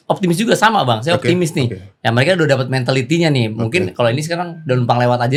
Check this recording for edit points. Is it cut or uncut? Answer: uncut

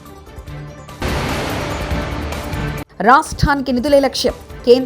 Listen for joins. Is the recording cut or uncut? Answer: cut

